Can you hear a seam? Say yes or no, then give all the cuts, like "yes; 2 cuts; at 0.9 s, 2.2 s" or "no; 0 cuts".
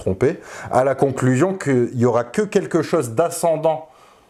no; 0 cuts